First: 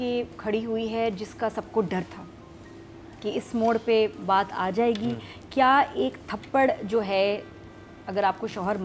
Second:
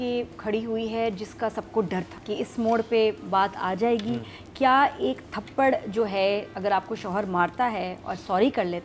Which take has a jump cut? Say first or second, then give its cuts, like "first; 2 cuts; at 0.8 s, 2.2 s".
second; 2 cuts; at 2.2 s, 6.5 s